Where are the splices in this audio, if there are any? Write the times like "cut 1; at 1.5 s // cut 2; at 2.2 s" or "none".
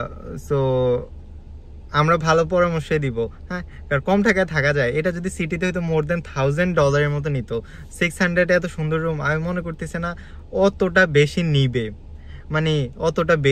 none